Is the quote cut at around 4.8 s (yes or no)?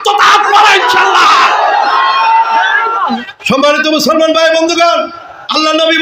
no